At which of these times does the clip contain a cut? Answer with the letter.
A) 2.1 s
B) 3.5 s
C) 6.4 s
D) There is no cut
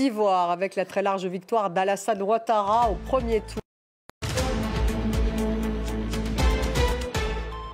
B